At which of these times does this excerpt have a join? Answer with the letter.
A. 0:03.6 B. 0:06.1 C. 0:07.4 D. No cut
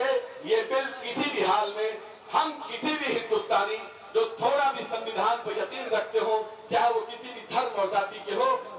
D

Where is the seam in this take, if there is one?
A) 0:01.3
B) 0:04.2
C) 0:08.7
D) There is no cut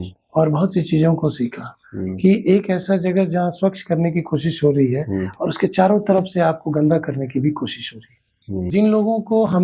C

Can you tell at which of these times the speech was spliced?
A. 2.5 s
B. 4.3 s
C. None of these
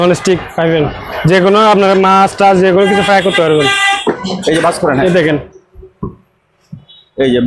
B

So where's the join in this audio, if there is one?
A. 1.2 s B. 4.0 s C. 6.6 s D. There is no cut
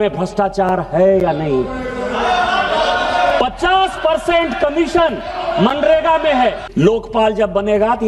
C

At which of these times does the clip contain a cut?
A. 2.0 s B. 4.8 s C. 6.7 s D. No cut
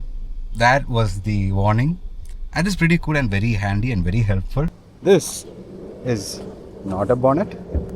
B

